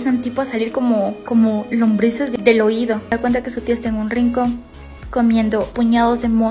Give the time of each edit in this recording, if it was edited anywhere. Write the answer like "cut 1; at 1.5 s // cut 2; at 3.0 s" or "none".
cut 1; at 2.3 s // cut 2; at 3.1 s // cut 3; at 5.7 s